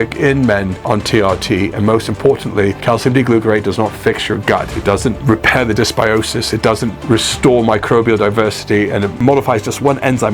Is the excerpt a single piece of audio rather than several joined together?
yes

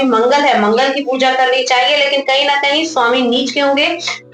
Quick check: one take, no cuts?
yes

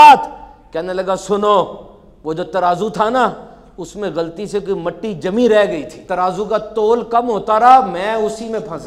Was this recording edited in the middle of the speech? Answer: yes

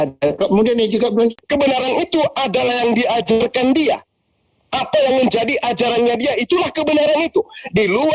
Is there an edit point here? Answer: yes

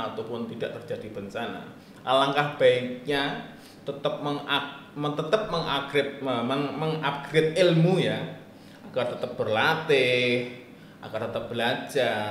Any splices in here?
no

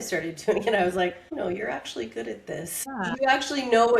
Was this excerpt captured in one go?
no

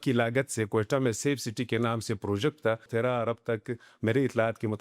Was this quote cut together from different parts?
yes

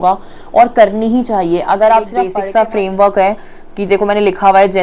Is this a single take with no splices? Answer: no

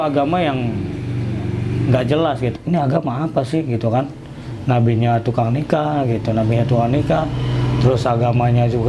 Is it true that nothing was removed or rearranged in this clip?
no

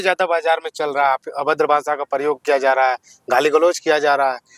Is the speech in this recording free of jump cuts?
yes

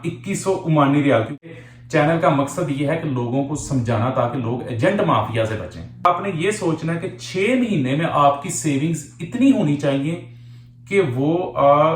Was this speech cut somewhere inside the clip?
yes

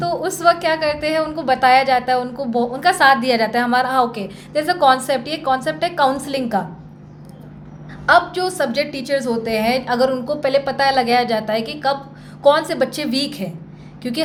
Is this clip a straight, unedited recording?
yes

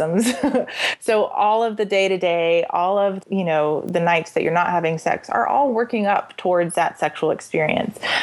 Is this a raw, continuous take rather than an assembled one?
no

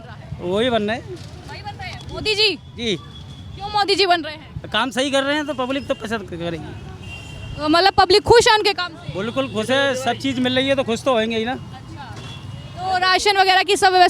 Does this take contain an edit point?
no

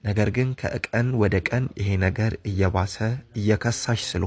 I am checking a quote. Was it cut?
no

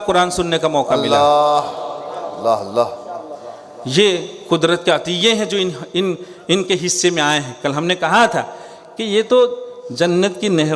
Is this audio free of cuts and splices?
yes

